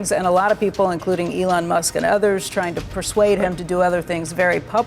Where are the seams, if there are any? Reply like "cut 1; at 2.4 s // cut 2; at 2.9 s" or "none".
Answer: cut 1; at 2.9 s